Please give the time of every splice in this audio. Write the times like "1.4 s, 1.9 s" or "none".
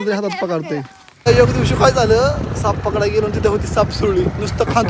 1.3 s